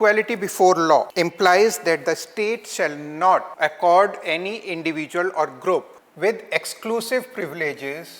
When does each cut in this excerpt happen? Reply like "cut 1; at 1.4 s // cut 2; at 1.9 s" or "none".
cut 1; at 1.1 s // cut 2; at 3.5 s // cut 3; at 6.0 s